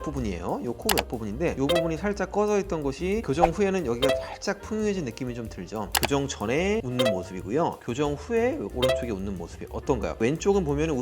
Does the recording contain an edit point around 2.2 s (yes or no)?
no